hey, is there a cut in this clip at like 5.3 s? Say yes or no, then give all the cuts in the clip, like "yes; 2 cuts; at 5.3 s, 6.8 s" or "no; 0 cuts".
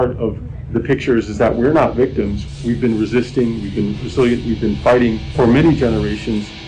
yes; 2 cuts; at 2.4 s, 5.3 s